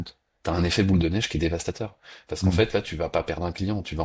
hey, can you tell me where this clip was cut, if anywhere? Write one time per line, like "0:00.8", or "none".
none